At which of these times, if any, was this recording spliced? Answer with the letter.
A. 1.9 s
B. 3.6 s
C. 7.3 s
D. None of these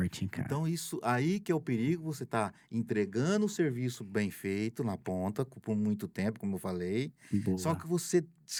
D